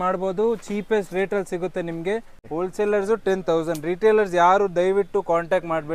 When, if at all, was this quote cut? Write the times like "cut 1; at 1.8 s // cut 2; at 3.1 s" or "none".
cut 1; at 2.4 s